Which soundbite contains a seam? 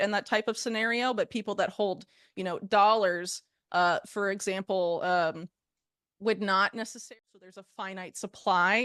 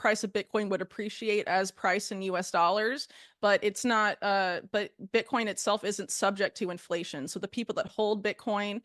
first; 1 cut; at 7.1 s

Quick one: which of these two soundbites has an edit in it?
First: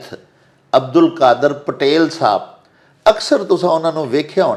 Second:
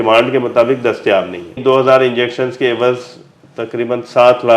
second; 1 cut; at 1.6 s

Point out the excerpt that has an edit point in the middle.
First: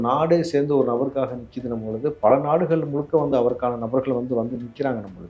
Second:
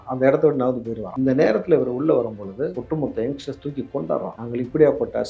second; 3 cuts; at 1.0 s, 2.8 s, 4.4 s

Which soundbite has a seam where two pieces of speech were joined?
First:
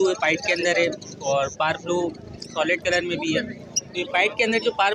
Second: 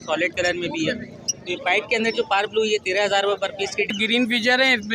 second; 1 cut; at 3.9 s

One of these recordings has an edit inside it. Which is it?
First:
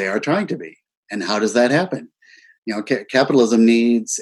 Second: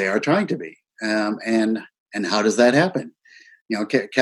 first; 1 cut; at 0.9 s

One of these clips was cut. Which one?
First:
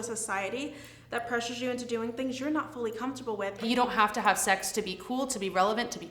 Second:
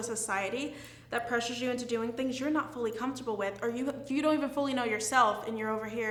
first; 1 cut; at 3.6 s

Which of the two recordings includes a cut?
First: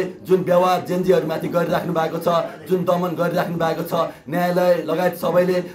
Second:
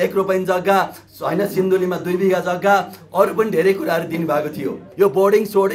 second; 1 cut; at 4.8 s

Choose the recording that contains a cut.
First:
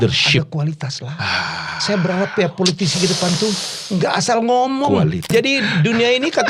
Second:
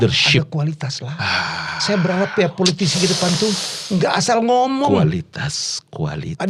first; 1 cut; at 5.3 s

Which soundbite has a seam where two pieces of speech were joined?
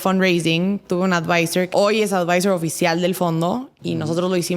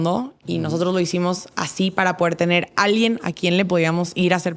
first; 1 cut; at 1.7 s

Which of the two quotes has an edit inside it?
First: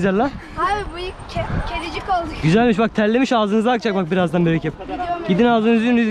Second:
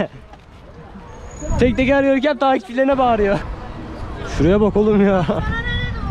second; 1 cut; at 3.4 s

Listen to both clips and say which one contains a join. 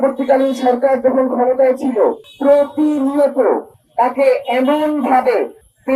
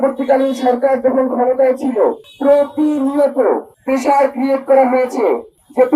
second; 1 cut; at 3.7 s

